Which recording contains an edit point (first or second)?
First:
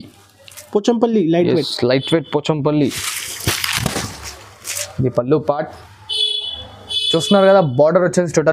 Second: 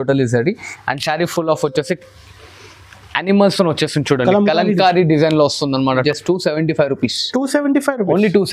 second